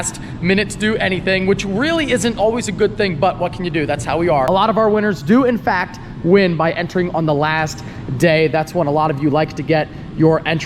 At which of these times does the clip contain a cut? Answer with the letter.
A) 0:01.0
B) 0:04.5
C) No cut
B